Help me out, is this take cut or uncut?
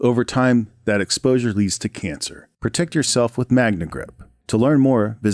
uncut